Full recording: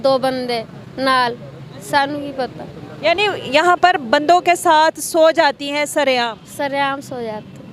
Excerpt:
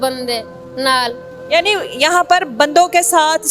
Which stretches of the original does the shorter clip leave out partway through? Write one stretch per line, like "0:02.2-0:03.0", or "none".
0:01.5-0:02.8